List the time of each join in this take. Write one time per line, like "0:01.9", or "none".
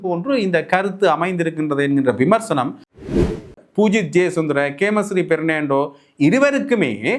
0:03.1